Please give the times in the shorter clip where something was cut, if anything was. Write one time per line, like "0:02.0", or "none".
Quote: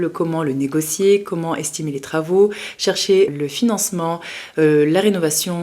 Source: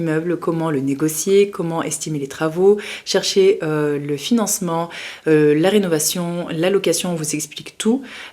0:03.3